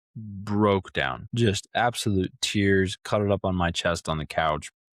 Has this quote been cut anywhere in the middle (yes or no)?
yes